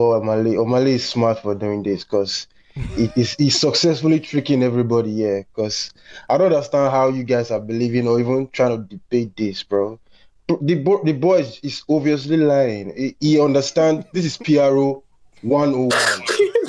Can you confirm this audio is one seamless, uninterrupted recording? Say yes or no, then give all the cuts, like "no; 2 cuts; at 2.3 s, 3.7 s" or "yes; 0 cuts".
yes; 0 cuts